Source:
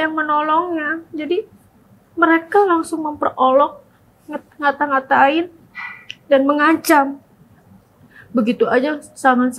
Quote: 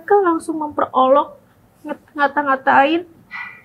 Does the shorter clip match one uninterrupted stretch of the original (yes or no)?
yes